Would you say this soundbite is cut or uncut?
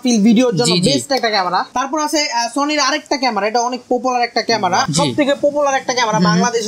cut